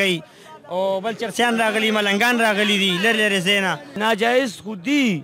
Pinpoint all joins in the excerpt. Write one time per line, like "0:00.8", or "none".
0:03.9